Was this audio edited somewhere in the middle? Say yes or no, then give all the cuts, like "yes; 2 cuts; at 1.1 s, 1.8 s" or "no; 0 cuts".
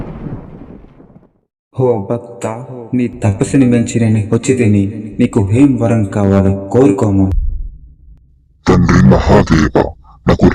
no; 0 cuts